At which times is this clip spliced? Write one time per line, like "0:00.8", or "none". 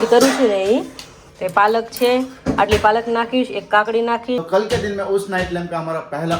0:04.4